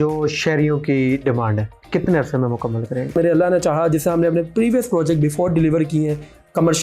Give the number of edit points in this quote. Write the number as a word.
two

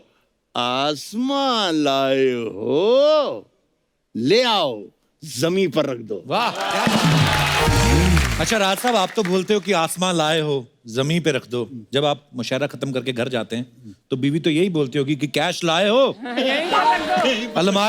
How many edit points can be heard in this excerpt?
one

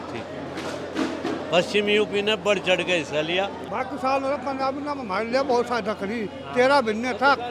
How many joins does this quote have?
one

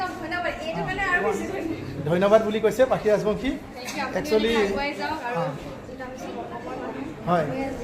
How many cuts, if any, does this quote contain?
zero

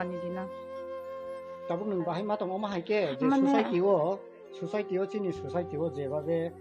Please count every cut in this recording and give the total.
zero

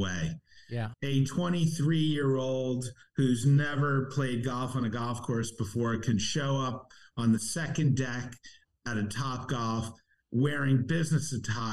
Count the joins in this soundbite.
one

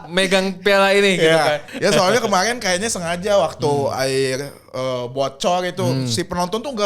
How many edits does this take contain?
one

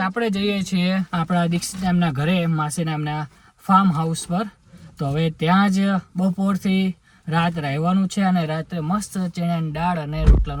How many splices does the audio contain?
zero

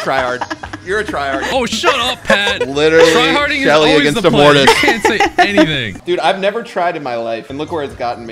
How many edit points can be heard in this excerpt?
one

